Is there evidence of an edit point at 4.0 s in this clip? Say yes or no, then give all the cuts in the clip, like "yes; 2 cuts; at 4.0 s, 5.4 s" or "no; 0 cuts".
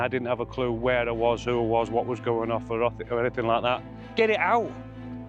yes; 1 cut; at 4.0 s